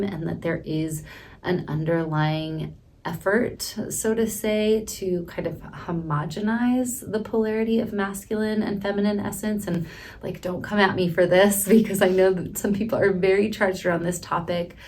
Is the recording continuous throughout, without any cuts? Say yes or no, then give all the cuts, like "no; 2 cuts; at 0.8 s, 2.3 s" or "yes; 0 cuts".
yes; 0 cuts